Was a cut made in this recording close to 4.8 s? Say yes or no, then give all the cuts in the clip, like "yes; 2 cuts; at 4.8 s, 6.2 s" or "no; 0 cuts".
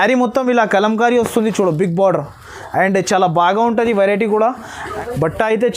yes; 1 cut; at 4.8 s